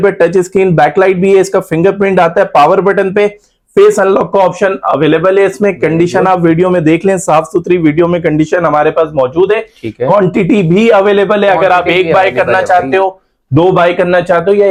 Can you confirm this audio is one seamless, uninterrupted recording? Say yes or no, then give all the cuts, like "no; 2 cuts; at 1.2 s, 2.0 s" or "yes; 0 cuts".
yes; 0 cuts